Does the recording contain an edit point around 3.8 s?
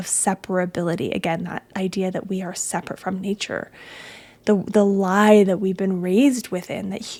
no; 0 cuts

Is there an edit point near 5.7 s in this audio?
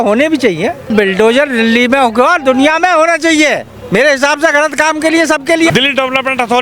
yes; 2 cuts; at 0.9 s, 5.7 s

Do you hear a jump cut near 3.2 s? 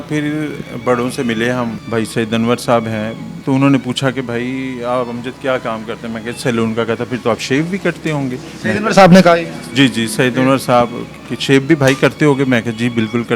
yes; 2 cuts; at 1.8 s, 3.2 s

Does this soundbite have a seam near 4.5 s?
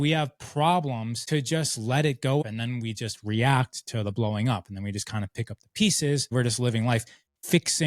no; 3 cuts; at 1.1 s, 2.4 s, 6.3 s

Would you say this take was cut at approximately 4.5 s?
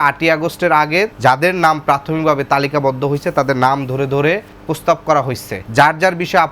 yes; 3 cuts; at 1.1 s, 4.5 s, 5.5 s

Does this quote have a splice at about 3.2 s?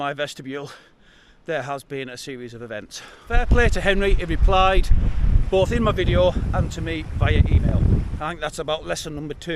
yes; 2 cuts; at 3.2 s, 8.1 s

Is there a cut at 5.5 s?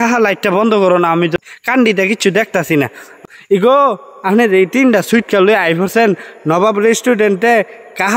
no; 2 cuts; at 1.4 s, 3.1 s

